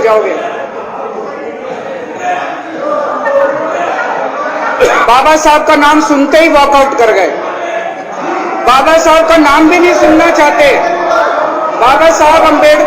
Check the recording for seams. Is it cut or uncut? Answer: cut